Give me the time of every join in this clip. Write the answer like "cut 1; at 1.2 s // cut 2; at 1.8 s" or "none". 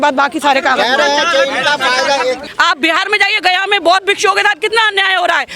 cut 1; at 2.5 s

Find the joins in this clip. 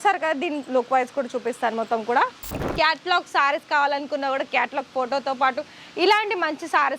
cut 1; at 2.7 s

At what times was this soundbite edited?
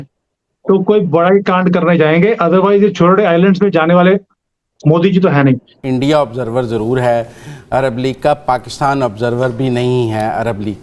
cut 1; at 5.7 s

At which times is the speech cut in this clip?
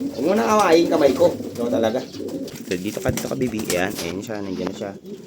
cut 1; at 2.5 s

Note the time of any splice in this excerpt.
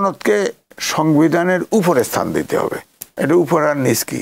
none

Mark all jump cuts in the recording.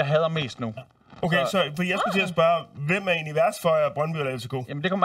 none

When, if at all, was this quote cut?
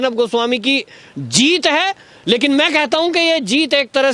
none

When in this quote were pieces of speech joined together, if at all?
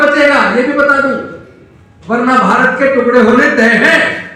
none

